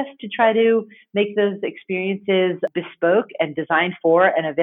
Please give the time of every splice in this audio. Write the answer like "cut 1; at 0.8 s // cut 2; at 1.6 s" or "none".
cut 1; at 2.7 s